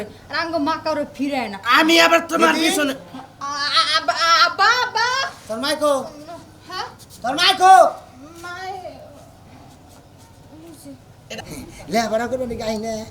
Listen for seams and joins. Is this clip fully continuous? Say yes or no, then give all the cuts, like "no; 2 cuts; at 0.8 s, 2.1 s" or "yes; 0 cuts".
no; 1 cut; at 11.2 s